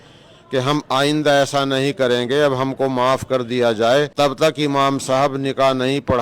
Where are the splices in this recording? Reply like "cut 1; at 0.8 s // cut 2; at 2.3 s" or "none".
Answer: cut 1; at 4.1 s

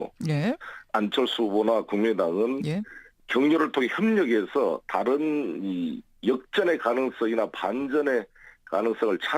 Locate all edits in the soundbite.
cut 1; at 2.8 s

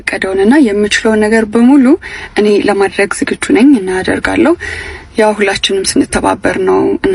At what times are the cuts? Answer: none

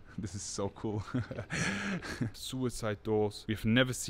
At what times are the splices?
cut 1; at 2.4 s

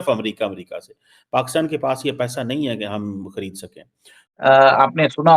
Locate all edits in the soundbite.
cut 1; at 4.2 s

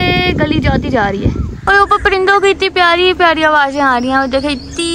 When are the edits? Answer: cut 1; at 1.5 s

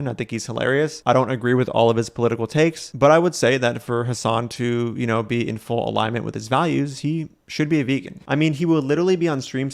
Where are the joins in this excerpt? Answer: cut 1; at 8.2 s

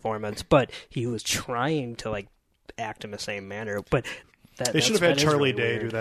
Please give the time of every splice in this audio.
cut 1; at 4.1 s

